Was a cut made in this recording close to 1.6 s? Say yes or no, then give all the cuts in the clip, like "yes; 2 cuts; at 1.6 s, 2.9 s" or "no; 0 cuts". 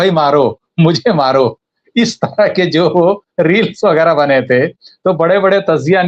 no; 0 cuts